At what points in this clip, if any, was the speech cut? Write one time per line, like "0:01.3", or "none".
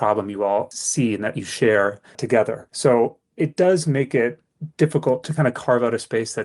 0:02.6
0:05.3